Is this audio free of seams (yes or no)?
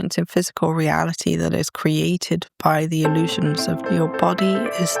no